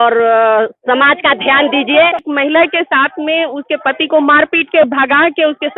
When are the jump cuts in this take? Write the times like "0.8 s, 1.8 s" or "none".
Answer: 2.2 s